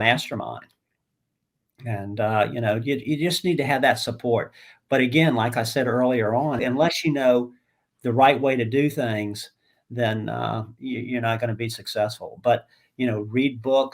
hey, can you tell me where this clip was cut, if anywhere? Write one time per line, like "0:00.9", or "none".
0:06.6